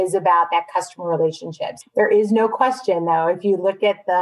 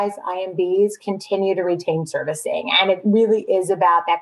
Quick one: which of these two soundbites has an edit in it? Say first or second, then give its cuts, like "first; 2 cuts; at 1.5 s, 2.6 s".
first; 1 cut; at 1.7 s